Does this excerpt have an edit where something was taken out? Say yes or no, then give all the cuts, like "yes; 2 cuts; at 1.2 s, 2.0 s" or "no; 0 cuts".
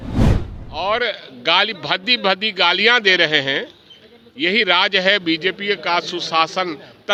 no; 0 cuts